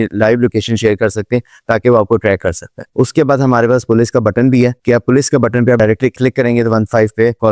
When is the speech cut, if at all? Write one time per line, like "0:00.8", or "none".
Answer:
none